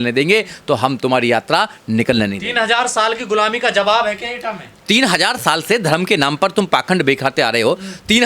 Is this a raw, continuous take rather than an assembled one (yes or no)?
no